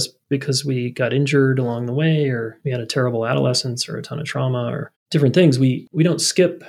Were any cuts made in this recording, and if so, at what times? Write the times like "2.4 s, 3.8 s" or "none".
2.6 s, 5.0 s